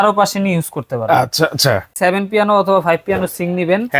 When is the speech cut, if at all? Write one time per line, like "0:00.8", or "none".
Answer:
0:01.9